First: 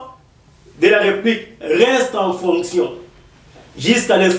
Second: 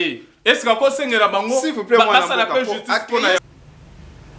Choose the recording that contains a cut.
second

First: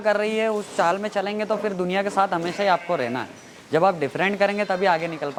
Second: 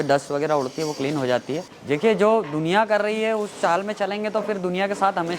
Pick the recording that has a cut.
second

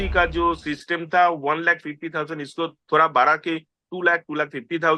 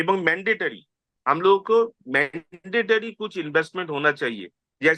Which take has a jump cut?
second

